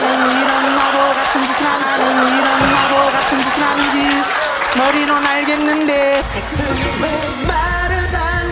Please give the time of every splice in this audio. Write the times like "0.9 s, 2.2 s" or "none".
1.8 s, 3.8 s